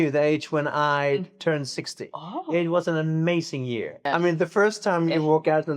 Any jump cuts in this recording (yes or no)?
yes